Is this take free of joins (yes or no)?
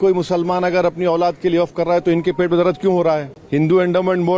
no